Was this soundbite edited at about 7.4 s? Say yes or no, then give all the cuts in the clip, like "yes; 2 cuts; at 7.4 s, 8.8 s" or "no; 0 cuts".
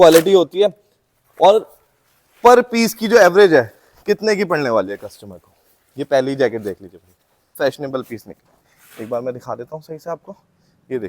yes; 1 cut; at 7.4 s